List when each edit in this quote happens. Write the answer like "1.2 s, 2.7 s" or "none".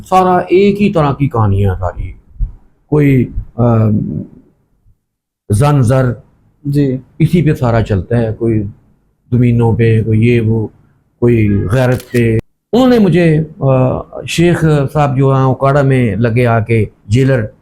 12.5 s